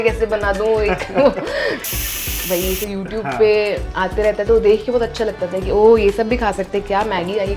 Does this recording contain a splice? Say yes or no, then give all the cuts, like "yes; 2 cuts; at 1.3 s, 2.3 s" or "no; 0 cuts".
yes; 1 cut; at 2.0 s